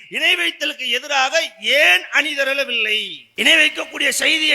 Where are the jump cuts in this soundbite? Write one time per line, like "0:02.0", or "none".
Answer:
0:03.3